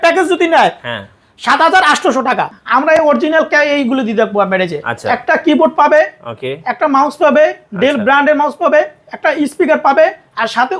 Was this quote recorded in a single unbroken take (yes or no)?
no